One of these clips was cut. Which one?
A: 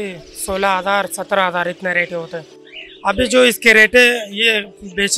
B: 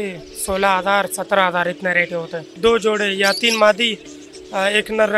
B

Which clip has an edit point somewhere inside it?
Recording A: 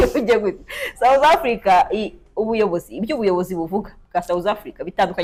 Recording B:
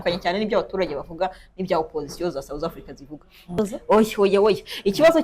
B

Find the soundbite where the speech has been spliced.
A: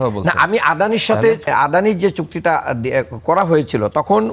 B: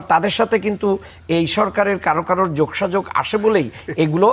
A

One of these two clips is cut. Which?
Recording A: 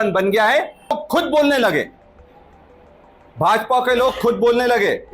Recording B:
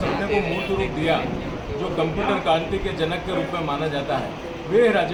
A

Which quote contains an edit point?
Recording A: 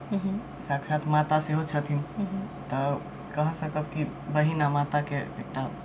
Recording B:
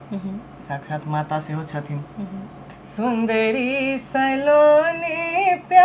B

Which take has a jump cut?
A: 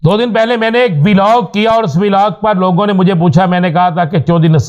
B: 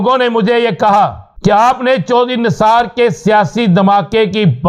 B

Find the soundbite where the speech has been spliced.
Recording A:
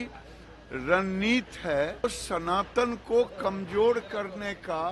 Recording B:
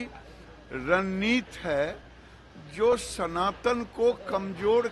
A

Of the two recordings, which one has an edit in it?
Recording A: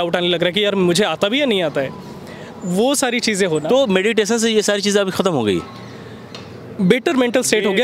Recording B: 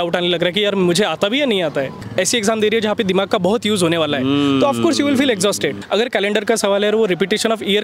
B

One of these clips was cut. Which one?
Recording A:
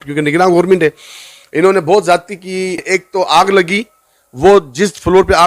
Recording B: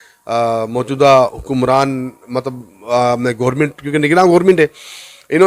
A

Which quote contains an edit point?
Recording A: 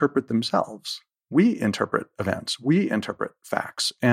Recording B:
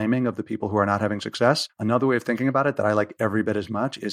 B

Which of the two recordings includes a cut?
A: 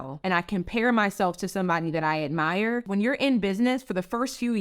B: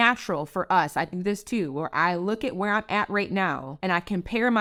A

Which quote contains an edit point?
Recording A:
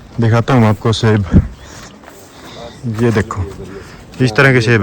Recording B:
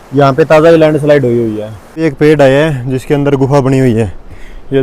B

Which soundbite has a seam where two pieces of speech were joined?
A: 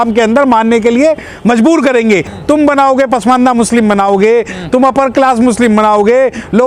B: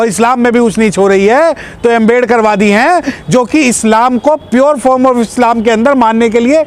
A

